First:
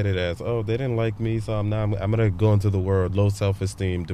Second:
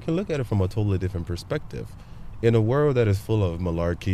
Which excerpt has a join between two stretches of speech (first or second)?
first